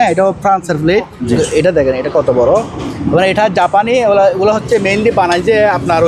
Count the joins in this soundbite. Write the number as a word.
one